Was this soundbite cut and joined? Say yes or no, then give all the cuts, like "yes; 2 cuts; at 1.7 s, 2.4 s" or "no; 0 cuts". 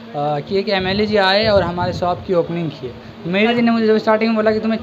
yes; 1 cut; at 3.5 s